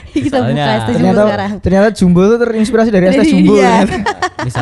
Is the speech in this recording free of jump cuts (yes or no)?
yes